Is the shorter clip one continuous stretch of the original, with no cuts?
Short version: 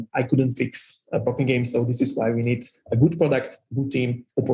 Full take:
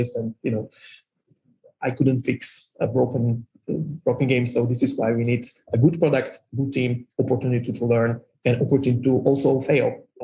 no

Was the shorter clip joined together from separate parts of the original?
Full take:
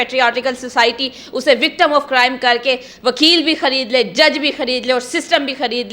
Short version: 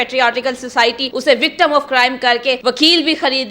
yes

